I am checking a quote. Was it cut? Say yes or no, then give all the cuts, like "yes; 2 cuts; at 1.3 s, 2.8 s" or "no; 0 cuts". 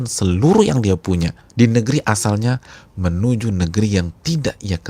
yes; 1 cut; at 1.4 s